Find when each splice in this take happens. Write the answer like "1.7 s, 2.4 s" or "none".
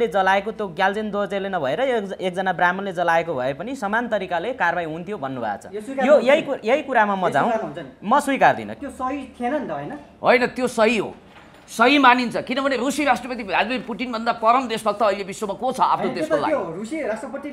8.7 s